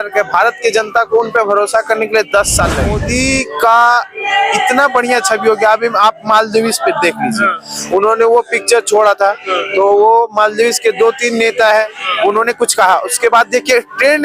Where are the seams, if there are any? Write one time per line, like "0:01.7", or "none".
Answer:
0:03.0